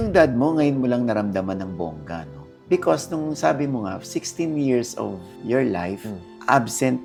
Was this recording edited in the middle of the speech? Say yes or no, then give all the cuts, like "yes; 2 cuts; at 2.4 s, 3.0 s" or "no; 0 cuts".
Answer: no; 0 cuts